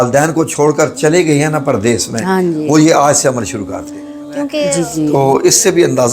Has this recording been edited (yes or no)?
yes